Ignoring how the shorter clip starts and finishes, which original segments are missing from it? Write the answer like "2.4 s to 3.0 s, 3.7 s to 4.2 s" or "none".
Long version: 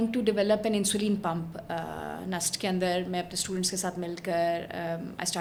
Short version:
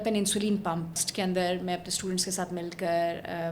1.6 s to 2.5 s